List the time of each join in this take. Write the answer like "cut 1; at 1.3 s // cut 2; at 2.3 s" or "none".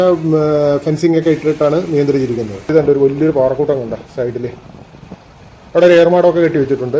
cut 1; at 2.6 s

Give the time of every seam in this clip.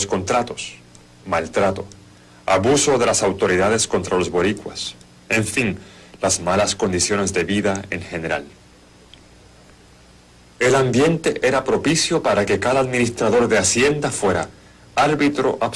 cut 1; at 2.8 s

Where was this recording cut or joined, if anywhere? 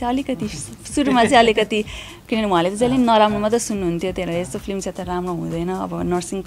none

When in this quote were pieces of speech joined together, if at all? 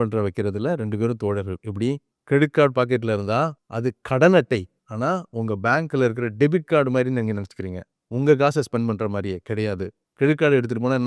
none

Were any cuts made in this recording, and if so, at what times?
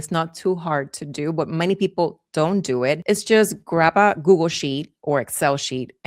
cut 1; at 3.0 s

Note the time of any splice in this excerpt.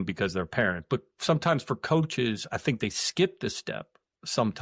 none

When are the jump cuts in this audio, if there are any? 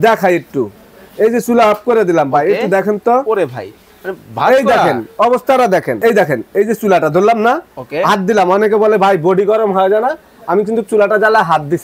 cut 1; at 6.0 s

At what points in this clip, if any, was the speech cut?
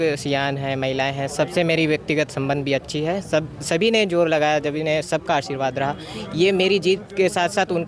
none

